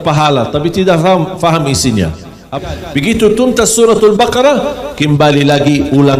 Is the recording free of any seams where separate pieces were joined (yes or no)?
no